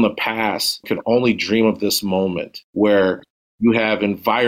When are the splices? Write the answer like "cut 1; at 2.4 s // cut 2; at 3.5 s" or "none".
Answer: cut 1; at 0.8 s // cut 2; at 2.5 s